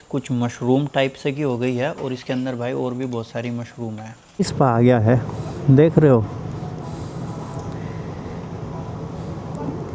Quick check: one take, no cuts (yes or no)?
no